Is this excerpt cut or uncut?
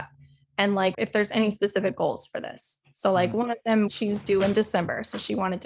cut